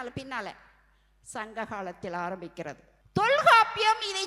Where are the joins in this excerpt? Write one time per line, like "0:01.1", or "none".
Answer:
0:02.9